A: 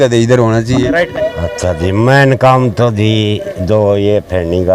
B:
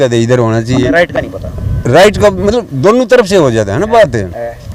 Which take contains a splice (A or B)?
A